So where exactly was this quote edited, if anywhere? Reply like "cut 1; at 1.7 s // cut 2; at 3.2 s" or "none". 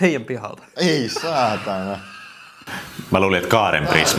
none

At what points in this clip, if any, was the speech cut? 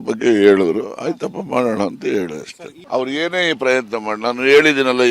none

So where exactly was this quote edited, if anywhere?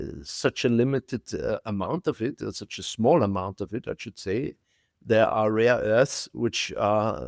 cut 1; at 4.9 s

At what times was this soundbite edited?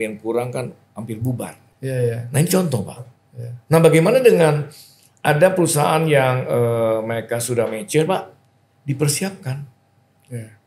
cut 1; at 1.6 s

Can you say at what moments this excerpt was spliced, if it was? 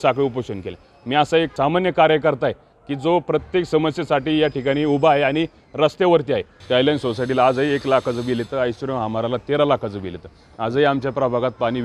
cut 1; at 1.5 s // cut 2; at 6.5 s

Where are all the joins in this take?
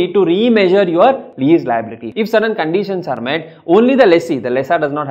cut 1; at 1.5 s

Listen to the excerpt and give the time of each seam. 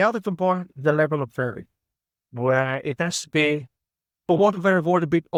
none

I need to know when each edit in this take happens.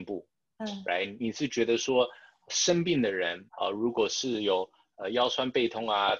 cut 1; at 1.1 s // cut 2; at 3.4 s

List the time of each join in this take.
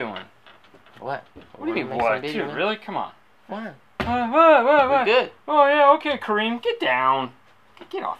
cut 1; at 6.3 s

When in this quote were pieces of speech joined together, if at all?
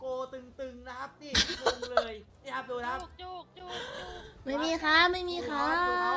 cut 1; at 2.3 s

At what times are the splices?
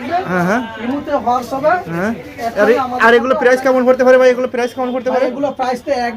none

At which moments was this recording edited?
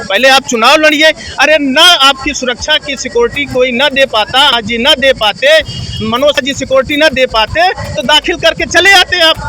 none

